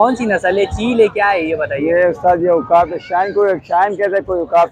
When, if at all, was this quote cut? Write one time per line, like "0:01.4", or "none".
none